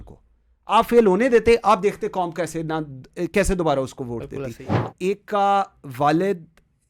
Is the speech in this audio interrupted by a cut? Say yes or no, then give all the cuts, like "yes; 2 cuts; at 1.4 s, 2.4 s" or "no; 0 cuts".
yes; 1 cut; at 4.7 s